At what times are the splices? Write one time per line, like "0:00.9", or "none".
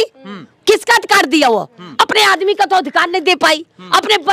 none